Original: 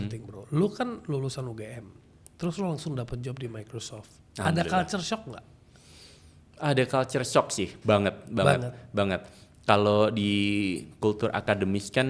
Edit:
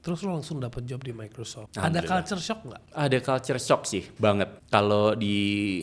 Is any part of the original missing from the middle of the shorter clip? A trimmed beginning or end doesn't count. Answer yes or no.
yes